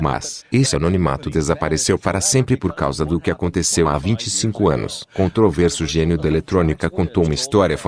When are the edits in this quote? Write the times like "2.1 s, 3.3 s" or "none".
none